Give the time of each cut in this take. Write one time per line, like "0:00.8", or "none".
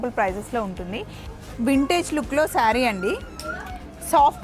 0:01.2